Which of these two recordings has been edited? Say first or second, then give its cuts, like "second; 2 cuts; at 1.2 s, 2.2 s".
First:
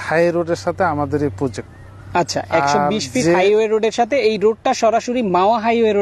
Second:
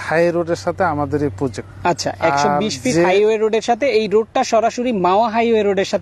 second; 1 cut; at 1.7 s